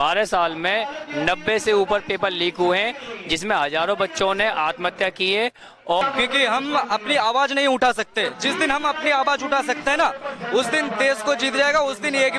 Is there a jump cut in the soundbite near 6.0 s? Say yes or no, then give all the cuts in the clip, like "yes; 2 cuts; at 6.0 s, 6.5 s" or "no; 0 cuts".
yes; 1 cut; at 6.0 s